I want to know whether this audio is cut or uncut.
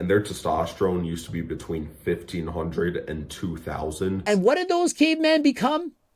cut